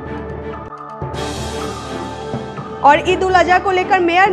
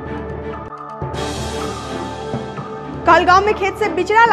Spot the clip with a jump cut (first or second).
first